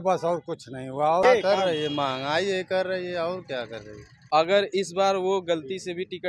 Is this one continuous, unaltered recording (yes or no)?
no